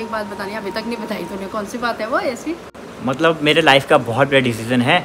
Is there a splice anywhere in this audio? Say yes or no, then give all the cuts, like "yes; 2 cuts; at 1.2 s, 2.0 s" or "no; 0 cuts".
no; 0 cuts